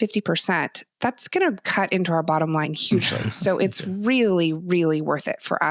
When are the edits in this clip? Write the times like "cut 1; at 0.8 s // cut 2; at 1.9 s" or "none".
none